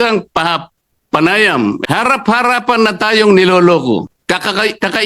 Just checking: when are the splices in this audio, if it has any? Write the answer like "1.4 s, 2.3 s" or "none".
1.8 s, 4.1 s